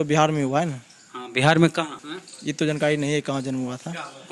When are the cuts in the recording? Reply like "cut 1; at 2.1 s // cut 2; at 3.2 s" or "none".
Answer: cut 1; at 2.0 s